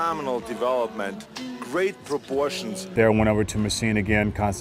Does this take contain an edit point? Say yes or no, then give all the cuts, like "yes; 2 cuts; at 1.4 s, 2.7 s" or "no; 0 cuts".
yes; 1 cut; at 2.9 s